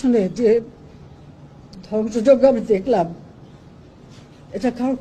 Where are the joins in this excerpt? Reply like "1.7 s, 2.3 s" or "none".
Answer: none